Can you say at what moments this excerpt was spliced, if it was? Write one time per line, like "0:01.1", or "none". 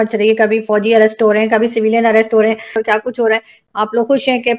0:02.8
0:03.6